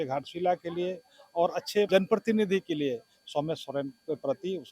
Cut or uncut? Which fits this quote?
cut